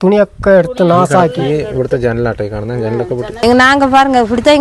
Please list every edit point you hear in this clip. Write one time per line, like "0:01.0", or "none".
0:03.3